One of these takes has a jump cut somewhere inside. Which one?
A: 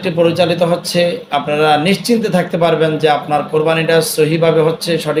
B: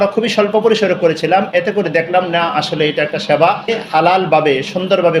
B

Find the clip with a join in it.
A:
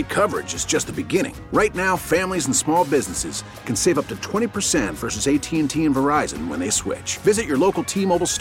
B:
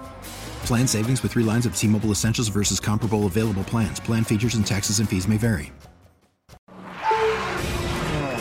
B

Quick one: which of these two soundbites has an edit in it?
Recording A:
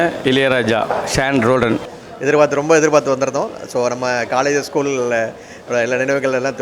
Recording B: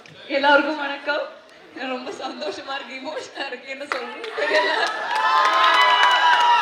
A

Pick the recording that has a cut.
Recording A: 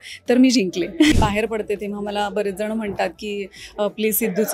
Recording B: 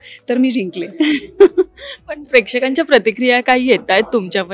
A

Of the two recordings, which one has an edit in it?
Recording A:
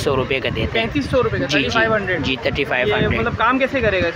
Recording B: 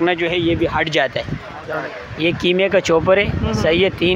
B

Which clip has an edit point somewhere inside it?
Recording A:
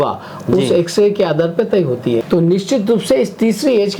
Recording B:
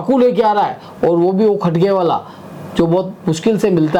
A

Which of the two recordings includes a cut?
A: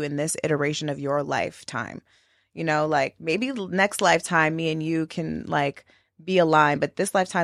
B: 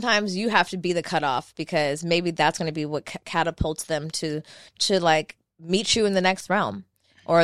B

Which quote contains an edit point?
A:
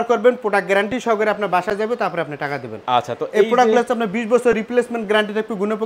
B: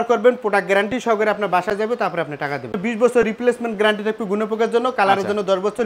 B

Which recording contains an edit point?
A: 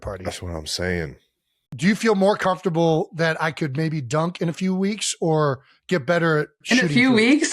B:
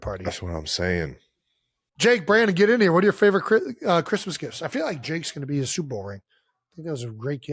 A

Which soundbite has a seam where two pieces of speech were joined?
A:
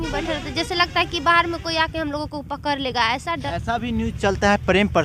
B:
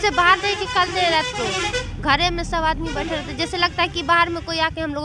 A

